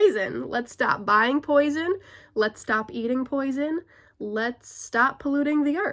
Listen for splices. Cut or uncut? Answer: uncut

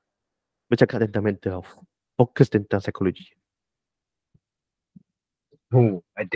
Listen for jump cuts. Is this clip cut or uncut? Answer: uncut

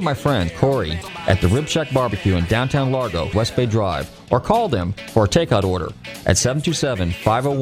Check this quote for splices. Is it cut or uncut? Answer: cut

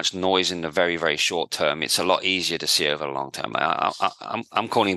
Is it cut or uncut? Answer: uncut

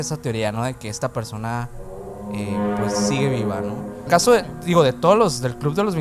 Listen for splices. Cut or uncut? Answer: cut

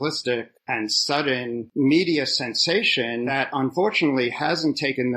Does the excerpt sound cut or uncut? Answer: cut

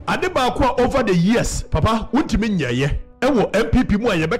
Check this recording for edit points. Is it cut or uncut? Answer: cut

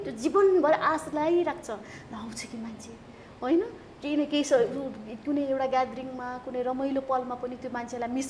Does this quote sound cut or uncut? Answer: uncut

